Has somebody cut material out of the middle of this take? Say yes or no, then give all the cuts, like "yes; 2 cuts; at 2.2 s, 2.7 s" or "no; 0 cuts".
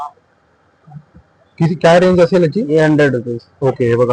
no; 0 cuts